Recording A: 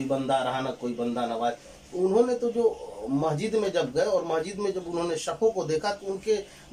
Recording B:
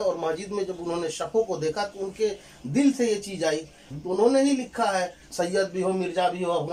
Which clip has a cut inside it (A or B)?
B